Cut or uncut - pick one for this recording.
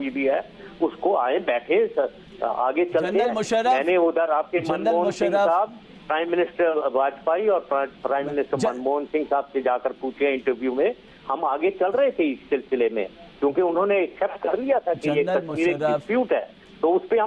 cut